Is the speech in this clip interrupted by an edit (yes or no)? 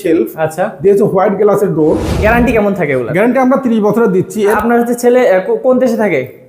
yes